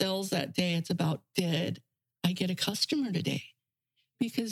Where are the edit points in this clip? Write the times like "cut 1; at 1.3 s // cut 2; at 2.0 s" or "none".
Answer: none